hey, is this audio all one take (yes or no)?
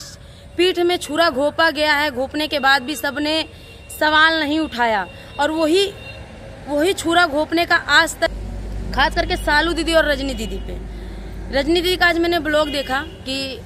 no